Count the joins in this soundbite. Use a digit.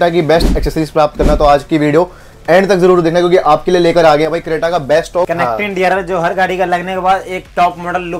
1